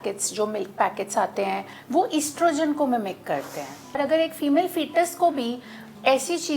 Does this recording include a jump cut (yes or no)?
yes